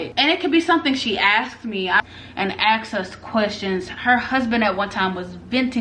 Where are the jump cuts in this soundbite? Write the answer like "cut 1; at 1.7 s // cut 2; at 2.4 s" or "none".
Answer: cut 1; at 2.0 s